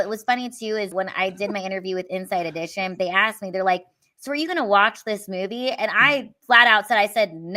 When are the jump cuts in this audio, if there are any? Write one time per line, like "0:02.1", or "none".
0:00.9